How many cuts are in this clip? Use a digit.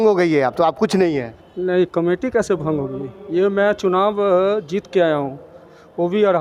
0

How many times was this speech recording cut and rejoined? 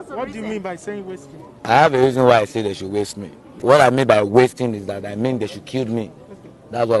1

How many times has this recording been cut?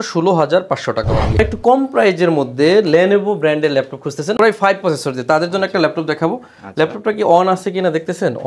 1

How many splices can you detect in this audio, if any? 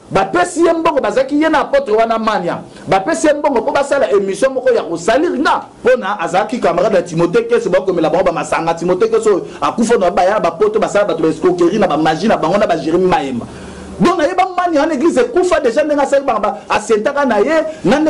1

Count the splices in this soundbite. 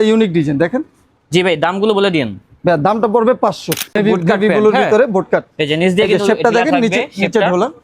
1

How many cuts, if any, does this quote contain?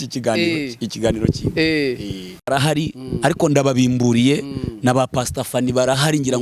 1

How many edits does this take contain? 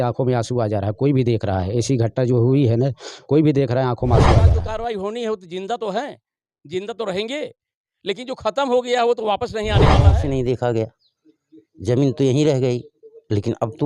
2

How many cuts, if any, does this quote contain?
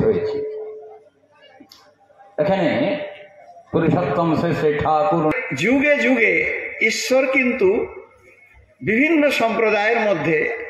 1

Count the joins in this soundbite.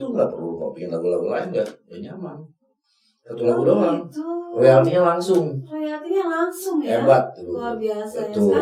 0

